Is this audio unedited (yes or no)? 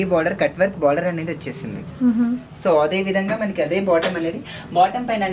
yes